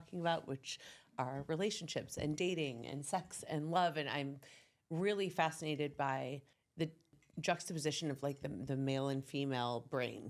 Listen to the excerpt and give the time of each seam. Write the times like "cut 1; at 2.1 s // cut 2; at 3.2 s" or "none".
cut 1; at 7.0 s